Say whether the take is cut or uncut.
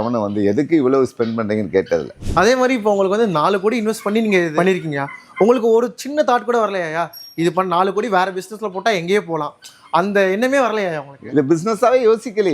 cut